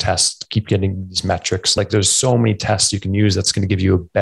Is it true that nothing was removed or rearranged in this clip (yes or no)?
no